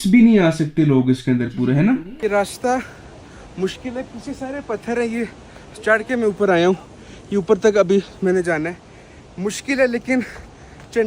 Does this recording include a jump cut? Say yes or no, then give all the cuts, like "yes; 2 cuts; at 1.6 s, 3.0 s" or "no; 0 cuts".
yes; 1 cut; at 2.1 s